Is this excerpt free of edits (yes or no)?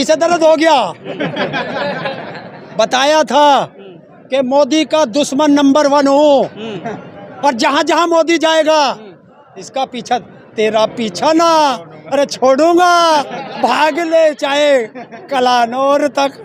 yes